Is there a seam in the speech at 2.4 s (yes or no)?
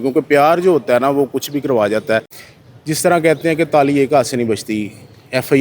yes